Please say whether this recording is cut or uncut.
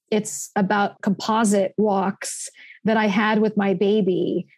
cut